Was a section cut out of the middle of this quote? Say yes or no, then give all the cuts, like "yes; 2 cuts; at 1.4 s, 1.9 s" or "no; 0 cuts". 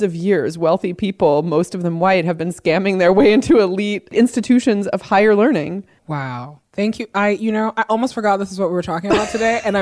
no; 0 cuts